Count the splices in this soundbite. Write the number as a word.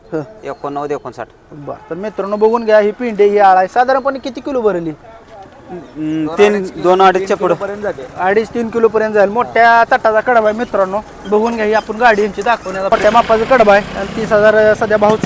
one